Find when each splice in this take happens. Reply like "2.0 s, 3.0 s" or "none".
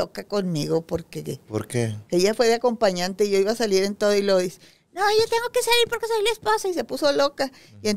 none

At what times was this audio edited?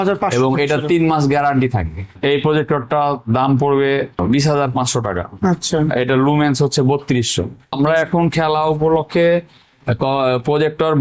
2.1 s, 7.7 s

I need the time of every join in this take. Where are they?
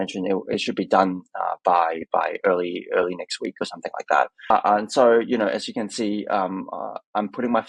4.5 s

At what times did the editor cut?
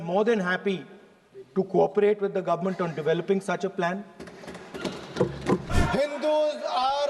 5.7 s

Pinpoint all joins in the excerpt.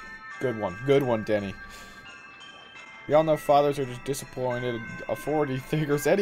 none

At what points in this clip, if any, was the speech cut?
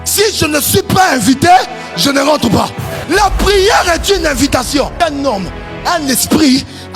2.9 s, 4.9 s

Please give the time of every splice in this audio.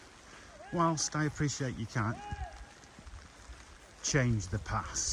none

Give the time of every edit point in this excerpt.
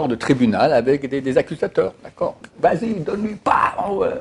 2.4 s

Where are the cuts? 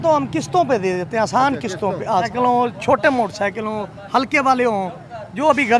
2.3 s

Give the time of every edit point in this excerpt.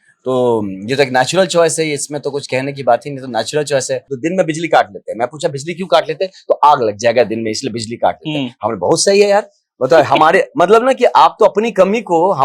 4.1 s

